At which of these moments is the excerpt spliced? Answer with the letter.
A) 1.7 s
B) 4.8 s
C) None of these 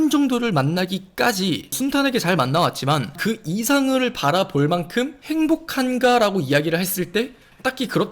A